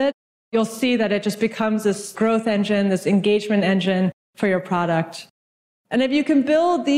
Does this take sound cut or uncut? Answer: cut